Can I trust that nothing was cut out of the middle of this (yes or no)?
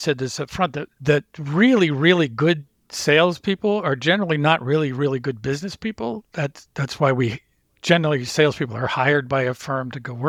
yes